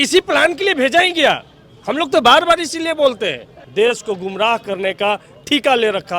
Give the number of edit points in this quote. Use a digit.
1